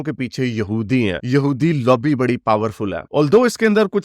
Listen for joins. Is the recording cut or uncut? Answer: uncut